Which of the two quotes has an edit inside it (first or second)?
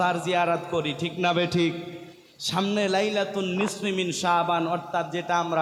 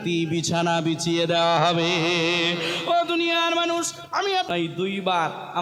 second